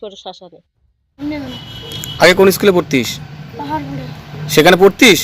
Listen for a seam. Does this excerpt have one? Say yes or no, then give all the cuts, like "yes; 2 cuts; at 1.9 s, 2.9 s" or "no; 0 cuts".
yes; 1 cut; at 1.0 s